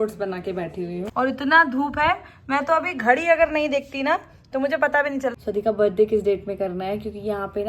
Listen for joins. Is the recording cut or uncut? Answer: cut